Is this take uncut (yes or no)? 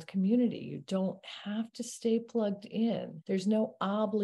no